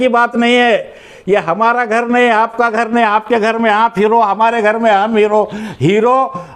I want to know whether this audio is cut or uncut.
uncut